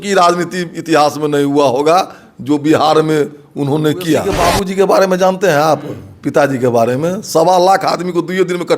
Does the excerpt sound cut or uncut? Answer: cut